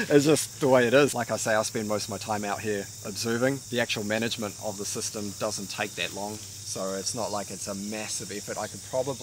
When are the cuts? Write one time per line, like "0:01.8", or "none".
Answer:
0:01.1
0:03.6